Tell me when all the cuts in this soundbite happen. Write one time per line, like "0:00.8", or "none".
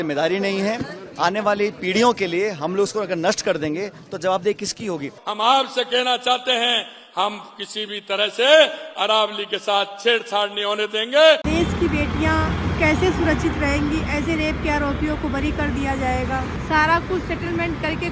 0:05.2
0:11.4
0:16.5